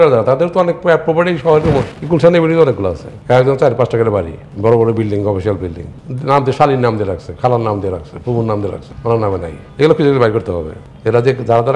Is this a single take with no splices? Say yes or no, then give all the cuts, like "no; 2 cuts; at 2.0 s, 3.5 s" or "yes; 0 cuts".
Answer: no; 1 cut; at 8.9 s